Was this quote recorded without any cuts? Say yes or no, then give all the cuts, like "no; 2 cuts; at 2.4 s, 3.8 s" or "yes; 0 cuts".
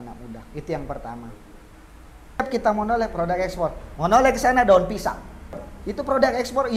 no; 2 cuts; at 2.4 s, 5.7 s